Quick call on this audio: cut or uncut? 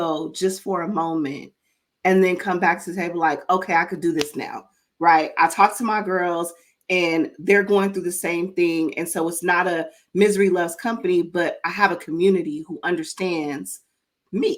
uncut